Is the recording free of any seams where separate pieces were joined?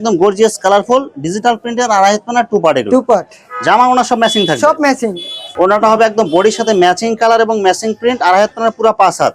yes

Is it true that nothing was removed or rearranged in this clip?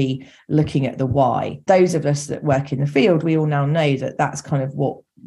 no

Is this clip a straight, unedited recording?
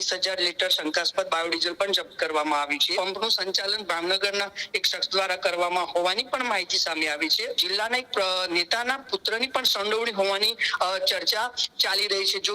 no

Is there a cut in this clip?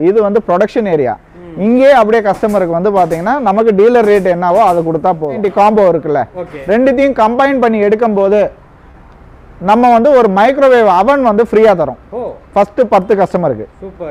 yes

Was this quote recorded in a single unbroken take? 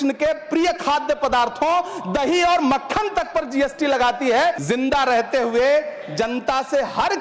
no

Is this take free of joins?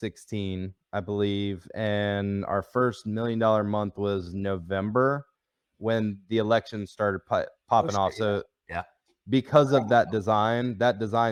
yes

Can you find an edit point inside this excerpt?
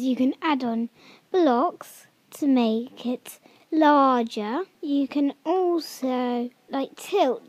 yes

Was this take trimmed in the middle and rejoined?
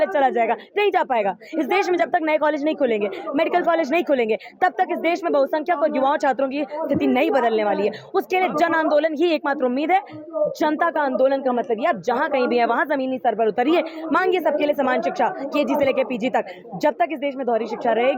no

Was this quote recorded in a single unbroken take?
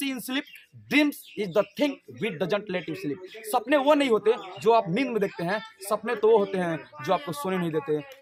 yes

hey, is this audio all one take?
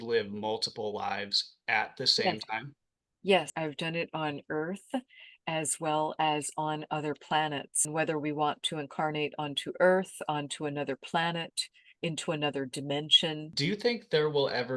no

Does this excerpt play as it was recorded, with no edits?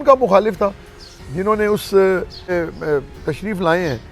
no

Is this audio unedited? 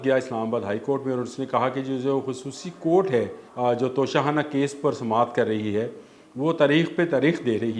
no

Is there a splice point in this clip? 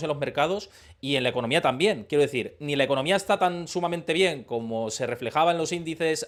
no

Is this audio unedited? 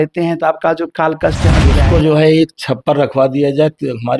no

